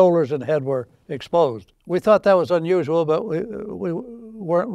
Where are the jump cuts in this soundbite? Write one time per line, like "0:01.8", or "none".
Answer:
none